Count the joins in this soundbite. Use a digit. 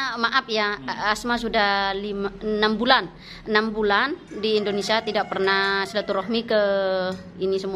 0